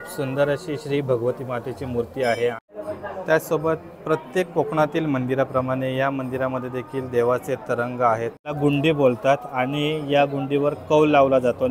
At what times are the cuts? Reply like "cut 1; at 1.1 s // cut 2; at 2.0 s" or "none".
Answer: cut 1; at 2.6 s // cut 2; at 8.6 s